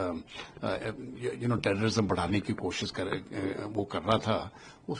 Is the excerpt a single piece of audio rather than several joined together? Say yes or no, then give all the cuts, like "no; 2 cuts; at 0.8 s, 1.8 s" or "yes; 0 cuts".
yes; 0 cuts